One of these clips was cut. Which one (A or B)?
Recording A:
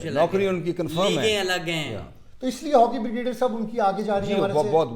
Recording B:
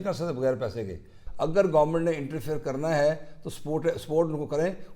B